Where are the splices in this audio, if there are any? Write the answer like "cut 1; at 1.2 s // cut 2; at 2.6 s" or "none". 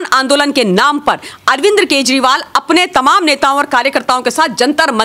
none